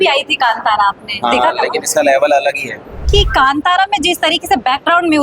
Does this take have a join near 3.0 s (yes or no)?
yes